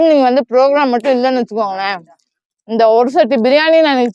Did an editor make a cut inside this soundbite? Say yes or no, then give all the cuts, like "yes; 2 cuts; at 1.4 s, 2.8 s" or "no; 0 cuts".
no; 0 cuts